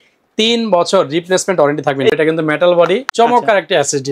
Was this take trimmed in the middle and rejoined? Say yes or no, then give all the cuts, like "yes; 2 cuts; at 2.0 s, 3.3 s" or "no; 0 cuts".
yes; 2 cuts; at 2.1 s, 3.1 s